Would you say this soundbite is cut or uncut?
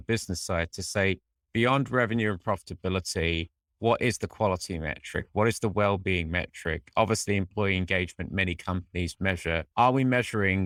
uncut